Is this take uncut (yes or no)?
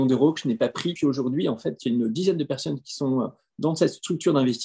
no